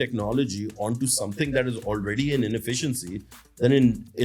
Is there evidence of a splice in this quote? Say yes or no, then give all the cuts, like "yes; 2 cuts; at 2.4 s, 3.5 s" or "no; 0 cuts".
no; 0 cuts